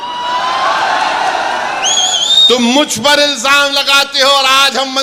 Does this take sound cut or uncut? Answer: uncut